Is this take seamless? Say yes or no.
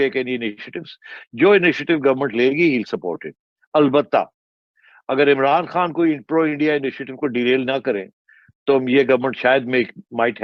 yes